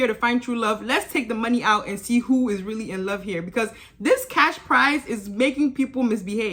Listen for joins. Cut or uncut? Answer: uncut